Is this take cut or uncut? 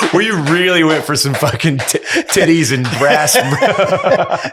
uncut